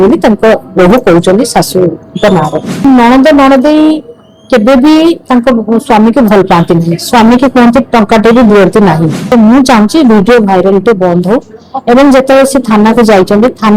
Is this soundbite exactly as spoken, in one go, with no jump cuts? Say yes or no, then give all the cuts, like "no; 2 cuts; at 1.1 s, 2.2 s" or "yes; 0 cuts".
no; 2 cuts; at 2.8 s, 9.3 s